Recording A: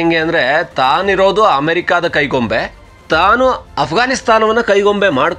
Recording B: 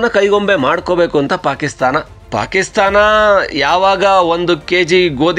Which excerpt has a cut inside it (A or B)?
B